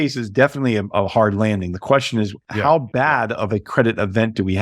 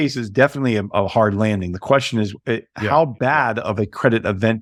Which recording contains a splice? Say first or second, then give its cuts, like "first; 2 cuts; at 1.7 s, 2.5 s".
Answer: first; 1 cut; at 2.4 s